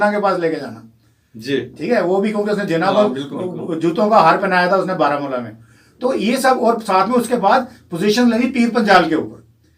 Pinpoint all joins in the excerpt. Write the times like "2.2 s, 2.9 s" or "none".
none